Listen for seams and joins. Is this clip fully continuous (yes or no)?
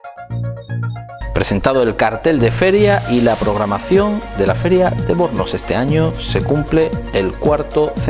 no